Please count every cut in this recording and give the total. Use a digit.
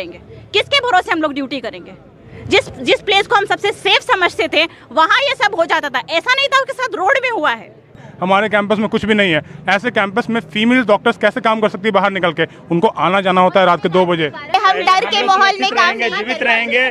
2